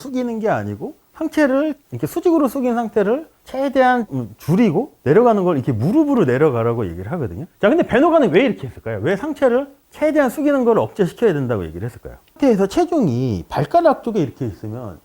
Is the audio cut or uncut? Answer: cut